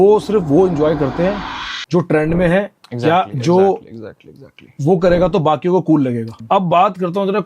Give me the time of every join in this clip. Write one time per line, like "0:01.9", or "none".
0:06.3